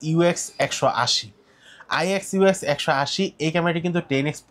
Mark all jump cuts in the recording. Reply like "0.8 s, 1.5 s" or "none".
none